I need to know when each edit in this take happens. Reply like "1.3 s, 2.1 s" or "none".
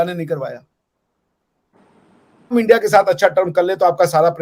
2.5 s